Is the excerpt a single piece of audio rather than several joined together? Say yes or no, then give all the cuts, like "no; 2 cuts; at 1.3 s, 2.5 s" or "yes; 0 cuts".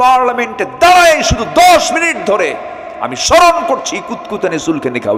yes; 0 cuts